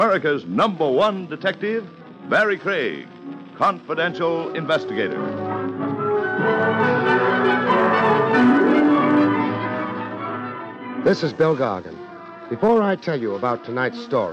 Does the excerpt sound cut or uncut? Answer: uncut